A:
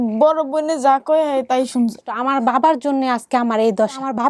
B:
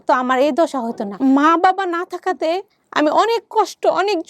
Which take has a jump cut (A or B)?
A